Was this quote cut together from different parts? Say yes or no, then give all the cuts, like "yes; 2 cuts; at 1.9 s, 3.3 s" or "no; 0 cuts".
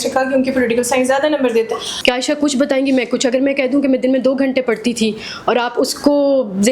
yes; 1 cut; at 1.9 s